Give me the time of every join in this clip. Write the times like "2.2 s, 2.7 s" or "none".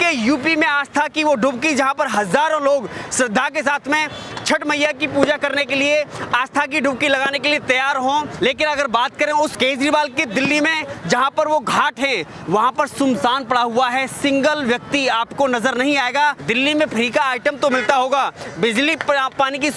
8.3 s, 9.5 s, 16.4 s